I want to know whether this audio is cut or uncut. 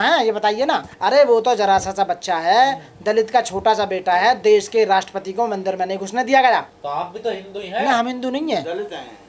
cut